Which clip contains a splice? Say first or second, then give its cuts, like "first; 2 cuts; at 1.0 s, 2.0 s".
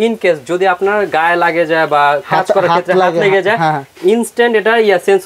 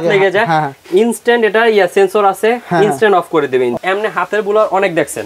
second; 1 cut; at 3.8 s